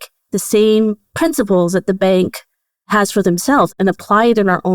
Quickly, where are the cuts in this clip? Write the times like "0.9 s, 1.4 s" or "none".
1.0 s

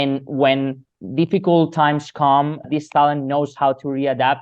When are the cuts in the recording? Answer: 1.0 s, 2.6 s

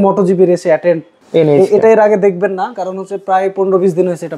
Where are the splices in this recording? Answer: 1.1 s

